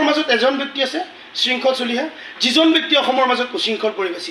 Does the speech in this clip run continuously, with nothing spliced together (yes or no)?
yes